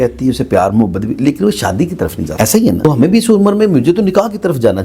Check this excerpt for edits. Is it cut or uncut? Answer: cut